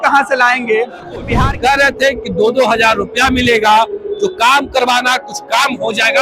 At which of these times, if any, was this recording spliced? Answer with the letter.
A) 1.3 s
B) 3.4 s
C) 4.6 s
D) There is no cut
A